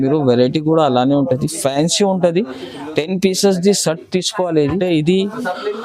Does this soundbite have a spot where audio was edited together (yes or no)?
yes